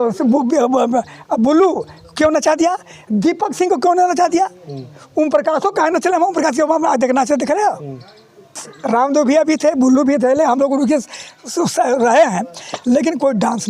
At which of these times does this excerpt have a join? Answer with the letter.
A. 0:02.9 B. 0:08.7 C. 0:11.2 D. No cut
B